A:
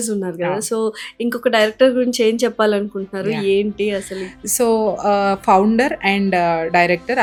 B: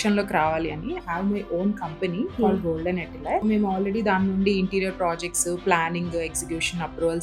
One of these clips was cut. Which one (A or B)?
B